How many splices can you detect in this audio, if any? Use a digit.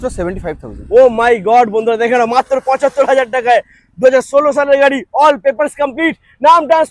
0